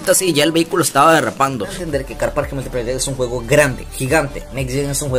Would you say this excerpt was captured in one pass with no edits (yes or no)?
no